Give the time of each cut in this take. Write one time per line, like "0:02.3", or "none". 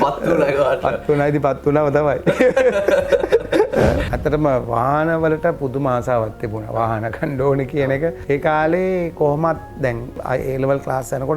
0:04.1